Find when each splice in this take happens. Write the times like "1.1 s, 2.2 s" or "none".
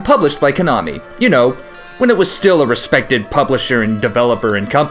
1.9 s